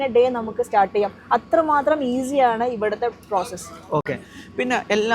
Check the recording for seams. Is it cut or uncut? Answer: uncut